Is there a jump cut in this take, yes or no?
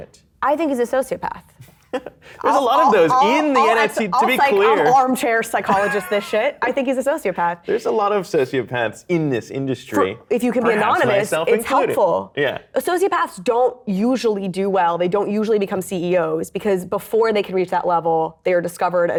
no